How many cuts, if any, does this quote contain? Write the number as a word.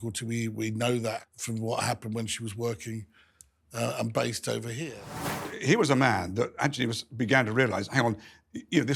two